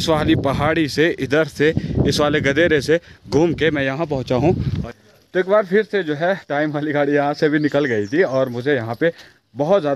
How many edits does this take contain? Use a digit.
1